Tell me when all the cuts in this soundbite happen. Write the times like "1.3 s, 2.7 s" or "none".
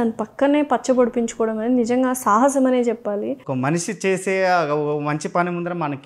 3.4 s